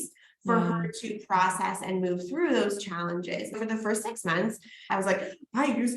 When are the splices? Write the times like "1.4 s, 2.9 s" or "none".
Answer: 3.5 s, 4.9 s